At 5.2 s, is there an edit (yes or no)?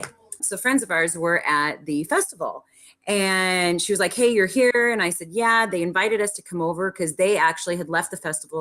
no